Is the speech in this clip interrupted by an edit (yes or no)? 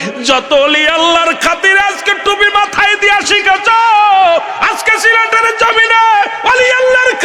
no